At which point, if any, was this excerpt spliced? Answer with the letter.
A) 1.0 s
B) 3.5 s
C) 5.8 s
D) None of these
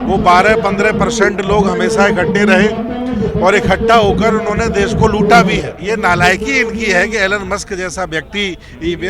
C